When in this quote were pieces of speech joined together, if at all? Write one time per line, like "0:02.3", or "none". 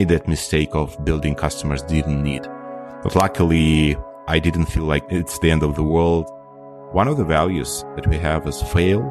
0:06.4